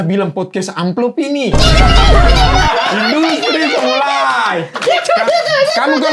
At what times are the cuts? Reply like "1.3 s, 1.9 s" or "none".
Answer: none